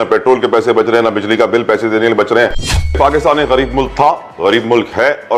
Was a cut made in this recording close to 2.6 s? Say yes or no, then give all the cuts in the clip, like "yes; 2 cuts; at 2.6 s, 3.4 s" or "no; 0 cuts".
yes; 1 cut; at 2.6 s